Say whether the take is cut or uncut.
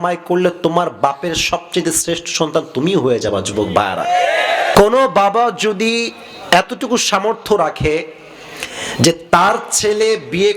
cut